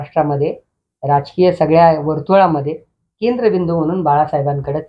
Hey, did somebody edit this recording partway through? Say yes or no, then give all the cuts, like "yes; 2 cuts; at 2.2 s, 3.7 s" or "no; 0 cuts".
no; 0 cuts